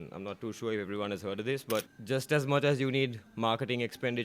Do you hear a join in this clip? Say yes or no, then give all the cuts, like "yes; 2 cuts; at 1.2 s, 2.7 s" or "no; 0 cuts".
yes; 1 cut; at 1.9 s